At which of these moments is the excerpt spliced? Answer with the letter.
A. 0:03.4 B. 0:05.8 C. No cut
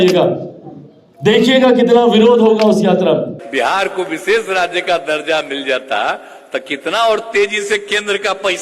A